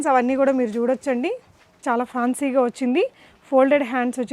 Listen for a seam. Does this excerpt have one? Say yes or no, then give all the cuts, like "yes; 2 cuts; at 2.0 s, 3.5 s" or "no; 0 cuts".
yes; 1 cut; at 1.8 s